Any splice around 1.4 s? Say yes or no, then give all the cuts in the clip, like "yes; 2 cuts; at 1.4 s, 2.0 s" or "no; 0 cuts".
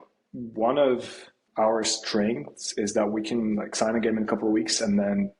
yes; 1 cut; at 1.4 s